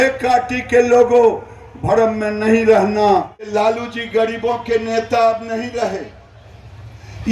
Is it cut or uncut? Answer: cut